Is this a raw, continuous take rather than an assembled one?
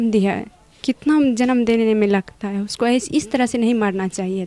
yes; 0 cuts

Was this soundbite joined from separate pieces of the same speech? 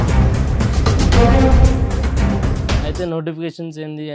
yes; 1 cut; at 2.9 s

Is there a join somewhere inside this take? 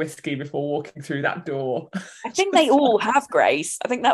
no; 0 cuts

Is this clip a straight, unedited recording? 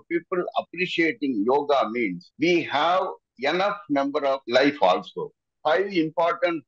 no; 2 cuts; at 4.4 s, 5.5 s

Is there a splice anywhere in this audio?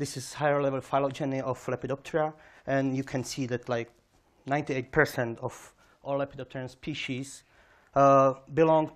yes; 1 cut; at 3.3 s

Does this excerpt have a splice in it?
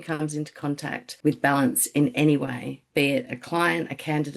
yes; 2 cuts; at 1.1 s, 2.8 s

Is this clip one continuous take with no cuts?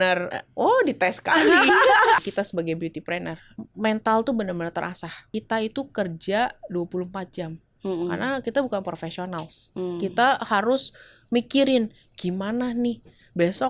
no; 3 cuts; at 2.2 s, 3.5 s, 5.2 s

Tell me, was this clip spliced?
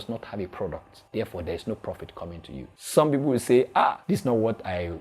yes; 3 cuts; at 0.9 s, 2.8 s, 4.0 s

